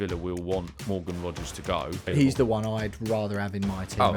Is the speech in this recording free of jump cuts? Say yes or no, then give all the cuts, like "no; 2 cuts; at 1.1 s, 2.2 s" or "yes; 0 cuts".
no; 1 cut; at 2.1 s